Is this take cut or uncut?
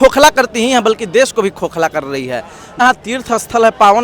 cut